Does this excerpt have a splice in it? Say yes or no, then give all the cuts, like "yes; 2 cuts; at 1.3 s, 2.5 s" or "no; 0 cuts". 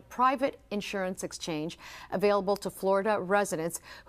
yes; 1 cut; at 1.2 s